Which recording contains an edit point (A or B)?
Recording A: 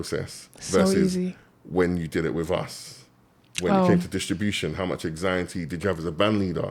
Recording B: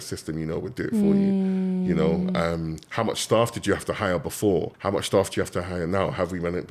B